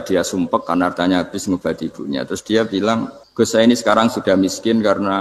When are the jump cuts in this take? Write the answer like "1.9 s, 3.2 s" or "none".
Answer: 3.2 s